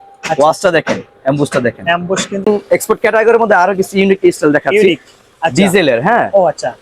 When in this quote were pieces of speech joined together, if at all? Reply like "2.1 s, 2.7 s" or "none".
2.5 s